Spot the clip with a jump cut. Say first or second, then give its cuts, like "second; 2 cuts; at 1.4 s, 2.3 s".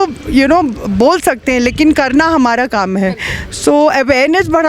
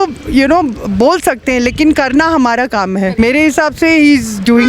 second; 1 cut; at 3.2 s